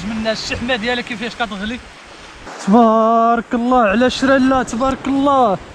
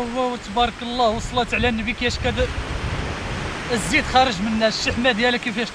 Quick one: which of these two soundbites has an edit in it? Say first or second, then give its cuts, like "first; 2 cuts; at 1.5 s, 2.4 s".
first; 1 cut; at 2.4 s